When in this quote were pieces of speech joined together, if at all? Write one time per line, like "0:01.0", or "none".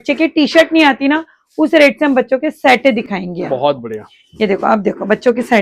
none